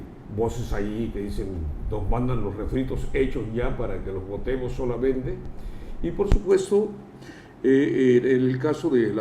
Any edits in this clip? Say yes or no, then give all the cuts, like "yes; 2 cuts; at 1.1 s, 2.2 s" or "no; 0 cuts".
yes; 1 cut; at 2.6 s